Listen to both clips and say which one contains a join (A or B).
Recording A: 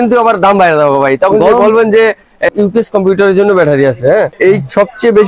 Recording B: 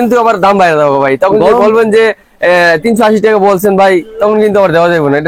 A